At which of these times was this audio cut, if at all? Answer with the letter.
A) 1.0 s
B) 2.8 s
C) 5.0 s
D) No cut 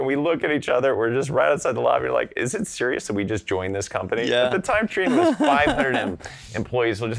D